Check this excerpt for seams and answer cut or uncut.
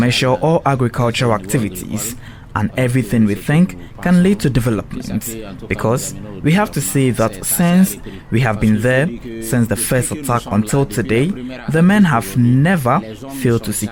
uncut